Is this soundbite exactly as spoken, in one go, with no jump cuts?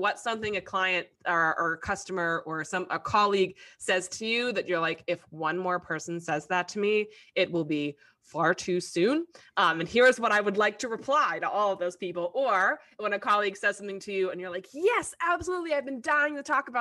yes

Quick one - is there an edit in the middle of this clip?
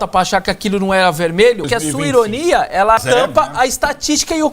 yes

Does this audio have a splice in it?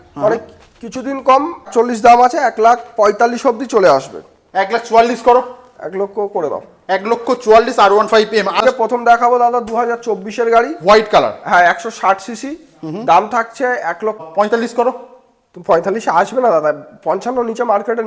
yes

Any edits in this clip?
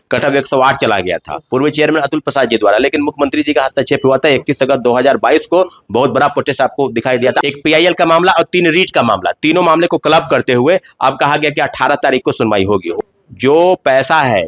yes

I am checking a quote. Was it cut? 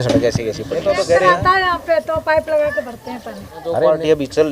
yes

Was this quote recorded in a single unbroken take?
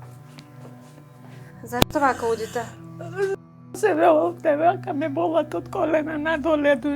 no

